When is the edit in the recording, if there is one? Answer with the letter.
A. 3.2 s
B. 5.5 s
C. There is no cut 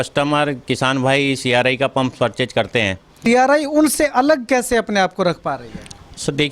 A